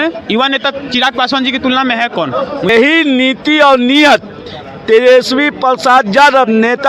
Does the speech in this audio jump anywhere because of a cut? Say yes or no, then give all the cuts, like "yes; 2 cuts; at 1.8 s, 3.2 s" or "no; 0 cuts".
yes; 1 cut; at 2.7 s